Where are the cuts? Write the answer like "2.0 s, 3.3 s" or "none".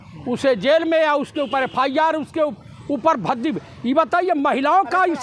none